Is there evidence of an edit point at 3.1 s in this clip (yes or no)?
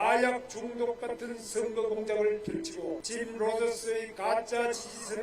yes